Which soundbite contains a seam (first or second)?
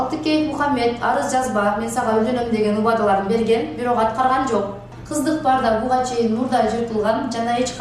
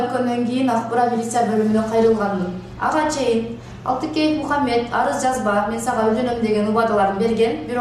first